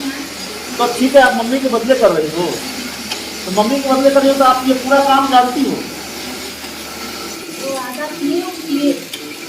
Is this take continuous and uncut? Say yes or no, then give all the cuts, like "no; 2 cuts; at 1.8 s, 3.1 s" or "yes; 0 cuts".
no; 1 cut; at 7.4 s